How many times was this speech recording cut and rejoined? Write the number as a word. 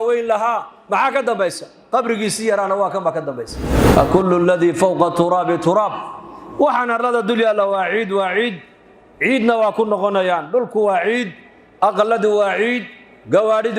one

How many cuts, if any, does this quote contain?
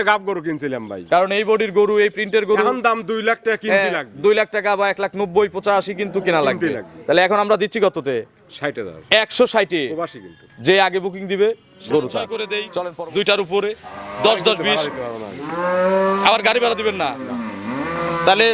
one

